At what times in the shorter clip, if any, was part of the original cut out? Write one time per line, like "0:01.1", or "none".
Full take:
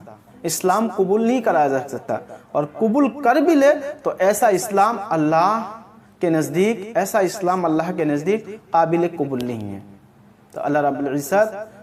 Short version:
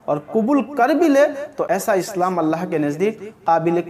0:01.6